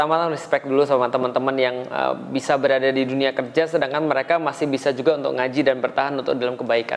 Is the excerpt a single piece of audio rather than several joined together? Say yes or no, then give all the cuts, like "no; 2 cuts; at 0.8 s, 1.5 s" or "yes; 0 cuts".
yes; 0 cuts